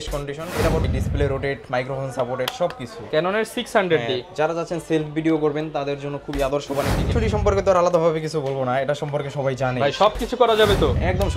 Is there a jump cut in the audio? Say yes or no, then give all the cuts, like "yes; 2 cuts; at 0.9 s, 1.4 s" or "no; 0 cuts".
yes; 2 cuts; at 0.9 s, 7.0 s